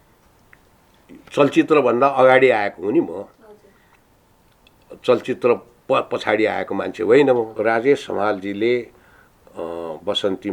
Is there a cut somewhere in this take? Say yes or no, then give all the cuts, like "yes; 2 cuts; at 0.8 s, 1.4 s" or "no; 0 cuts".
yes; 1 cut; at 7.5 s